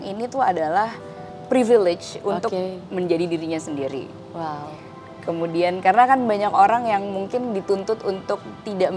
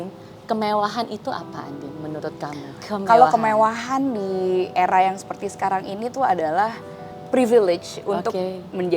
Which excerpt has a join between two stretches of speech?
second; 1 cut; at 2.8 s

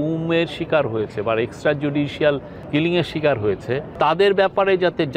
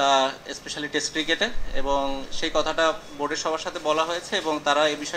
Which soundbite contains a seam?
first; 2 cuts; at 2.5 s, 3.9 s

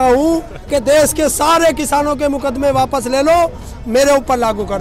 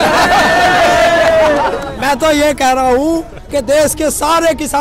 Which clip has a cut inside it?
second; 1 cut; at 1.9 s

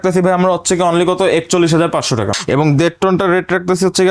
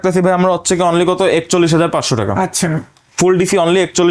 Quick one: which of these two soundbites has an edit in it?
first; 1 cut; at 2.3 s

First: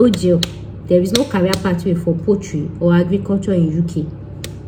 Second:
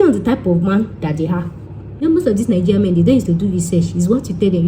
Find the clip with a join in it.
second; 1 cut; at 2.0 s

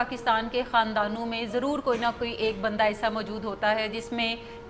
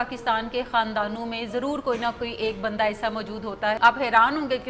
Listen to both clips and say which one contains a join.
second; 1 cut; at 3.8 s

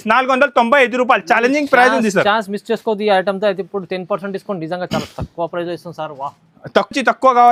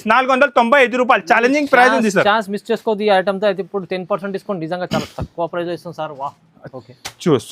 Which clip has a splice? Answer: second; 1 cut; at 6.5 s

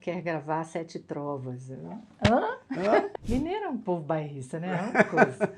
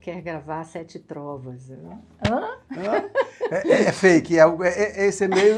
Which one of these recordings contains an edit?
first; 1 cut; at 3.1 s

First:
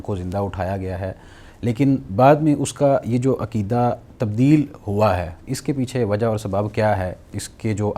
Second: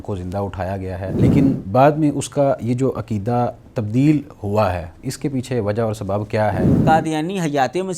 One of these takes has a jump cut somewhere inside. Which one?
second; 2 cuts; at 1.2 s, 6.8 s

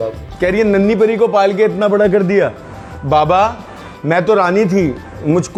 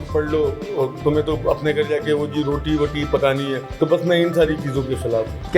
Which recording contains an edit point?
second; 1 cut; at 3.6 s

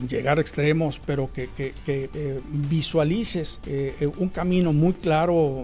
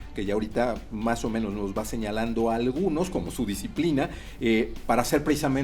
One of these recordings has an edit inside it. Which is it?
first; 2 cuts; at 2.1 s, 3.6 s

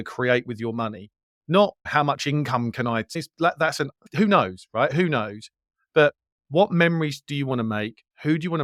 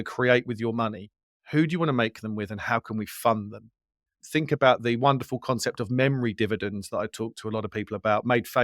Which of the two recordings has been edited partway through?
second; 2 cuts; at 1.3 s, 4.2 s

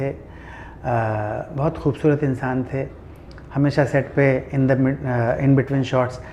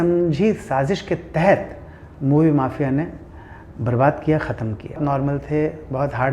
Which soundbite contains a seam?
second; 1 cut; at 5.0 s

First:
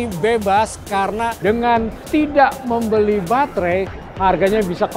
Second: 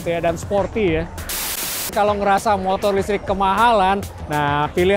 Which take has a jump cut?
second; 1 cut; at 1.7 s

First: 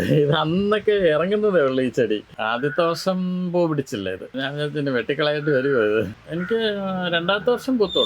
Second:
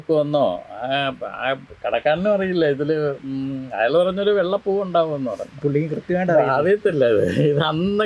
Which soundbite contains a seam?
first; 3 cuts; at 2.4 s, 4.3 s, 6.2 s

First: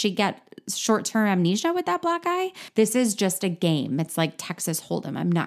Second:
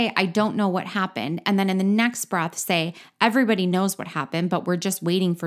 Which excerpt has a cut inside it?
first; 1 cut; at 2.6 s

